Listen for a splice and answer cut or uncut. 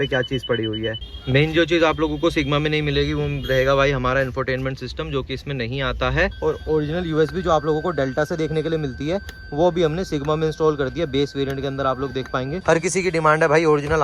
cut